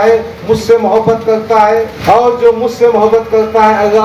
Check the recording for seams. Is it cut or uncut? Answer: cut